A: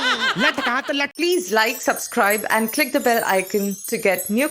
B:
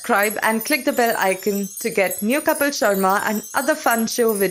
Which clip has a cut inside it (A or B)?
A